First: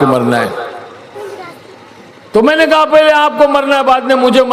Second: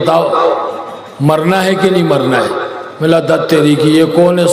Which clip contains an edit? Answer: first; 1 cut; at 1.1 s

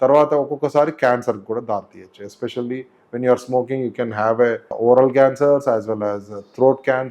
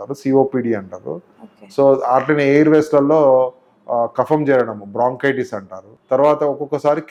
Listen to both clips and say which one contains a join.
first; 1 cut; at 4.7 s

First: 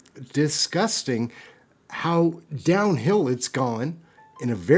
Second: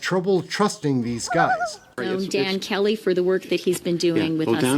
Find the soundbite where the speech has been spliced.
second; 1 cut; at 2.0 s

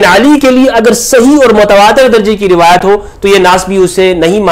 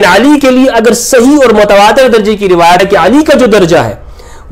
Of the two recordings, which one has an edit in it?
second; 1 cut; at 2.8 s

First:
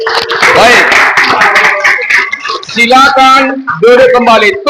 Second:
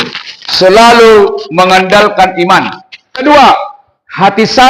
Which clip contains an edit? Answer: second; 1 cut; at 3.2 s

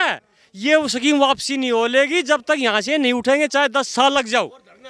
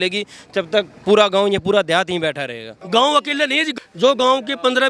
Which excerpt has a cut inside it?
second; 2 cuts; at 2.7 s, 3.7 s

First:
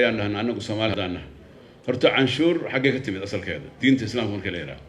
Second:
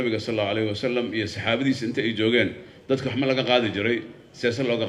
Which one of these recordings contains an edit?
first; 1 cut; at 0.9 s

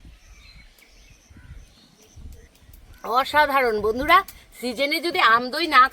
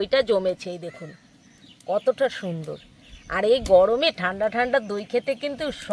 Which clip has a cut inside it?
first; 1 cut; at 2.5 s

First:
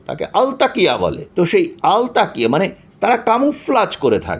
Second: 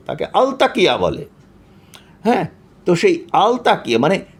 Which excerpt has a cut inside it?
first; 1 cut; at 1.2 s

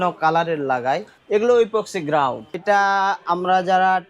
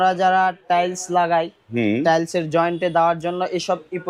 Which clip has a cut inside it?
first; 2 cuts; at 1.1 s, 2.6 s

